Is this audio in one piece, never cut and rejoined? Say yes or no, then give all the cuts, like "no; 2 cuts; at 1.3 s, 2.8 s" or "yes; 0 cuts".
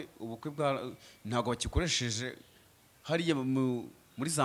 yes; 0 cuts